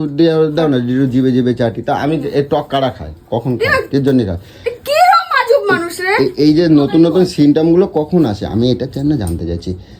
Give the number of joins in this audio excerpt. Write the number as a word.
zero